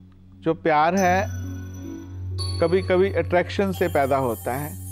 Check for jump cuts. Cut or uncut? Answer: uncut